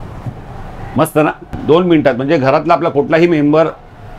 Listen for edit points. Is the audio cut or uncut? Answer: cut